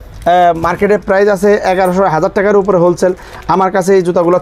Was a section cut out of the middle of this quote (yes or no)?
no